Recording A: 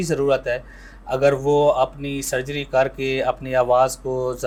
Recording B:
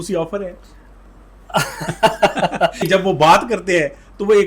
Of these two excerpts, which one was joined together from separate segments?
B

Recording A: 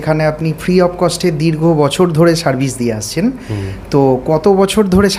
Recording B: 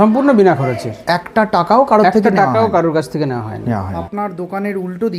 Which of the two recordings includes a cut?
B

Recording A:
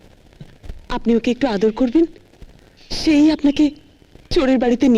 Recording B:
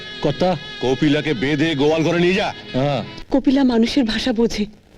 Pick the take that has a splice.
B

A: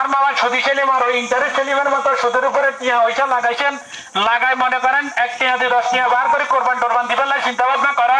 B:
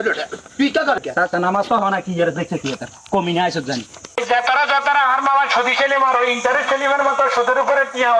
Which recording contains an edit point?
B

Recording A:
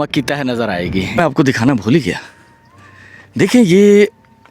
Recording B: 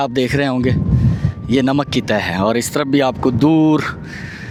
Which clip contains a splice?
A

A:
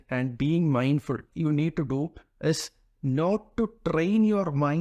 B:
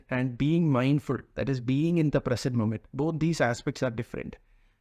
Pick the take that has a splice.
A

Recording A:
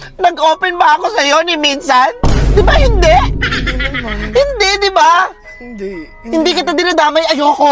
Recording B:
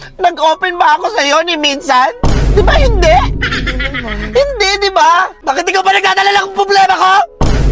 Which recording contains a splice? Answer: B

